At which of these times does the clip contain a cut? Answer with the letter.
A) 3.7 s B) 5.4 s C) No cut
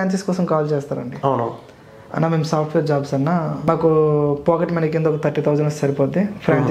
A